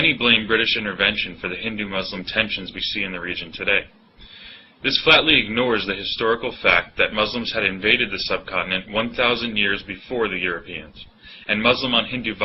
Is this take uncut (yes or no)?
yes